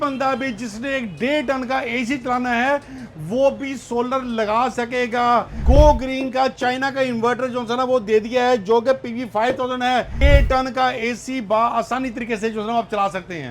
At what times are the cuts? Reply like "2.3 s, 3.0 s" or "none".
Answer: 5.6 s, 10.2 s